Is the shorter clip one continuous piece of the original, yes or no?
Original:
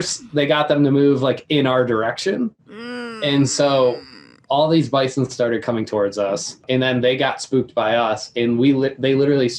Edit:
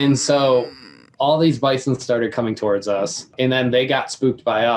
yes